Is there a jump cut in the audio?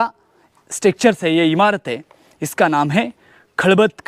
no; 0 cuts

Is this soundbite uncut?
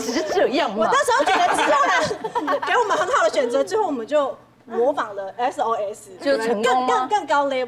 yes; 0 cuts

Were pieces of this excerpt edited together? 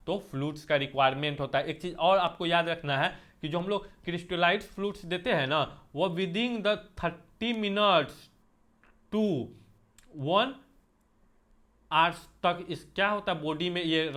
no; 0 cuts

